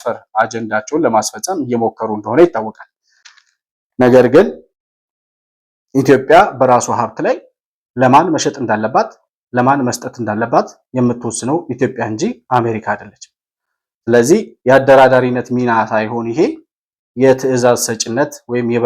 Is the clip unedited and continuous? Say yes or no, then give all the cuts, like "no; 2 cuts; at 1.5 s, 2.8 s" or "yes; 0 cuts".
yes; 0 cuts